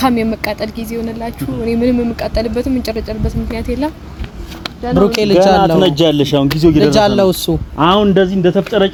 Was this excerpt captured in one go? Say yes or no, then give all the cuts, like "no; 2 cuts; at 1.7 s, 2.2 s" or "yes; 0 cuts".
yes; 0 cuts